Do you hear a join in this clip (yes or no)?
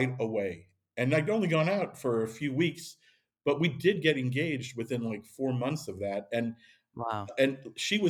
no